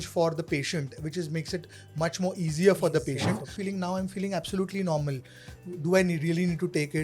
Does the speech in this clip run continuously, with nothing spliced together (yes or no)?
no